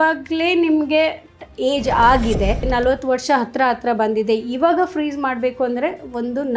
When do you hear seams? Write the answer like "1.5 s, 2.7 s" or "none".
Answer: 2.6 s